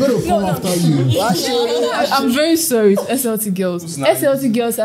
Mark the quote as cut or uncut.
cut